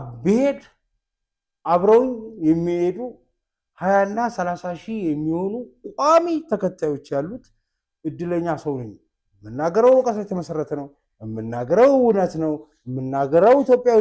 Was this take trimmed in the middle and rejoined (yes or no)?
no